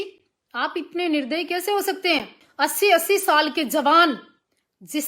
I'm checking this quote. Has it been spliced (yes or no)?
yes